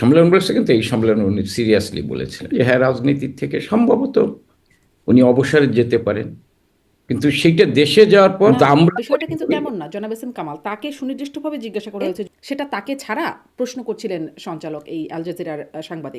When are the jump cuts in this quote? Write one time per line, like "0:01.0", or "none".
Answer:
0:02.4
0:08.5
0:12.2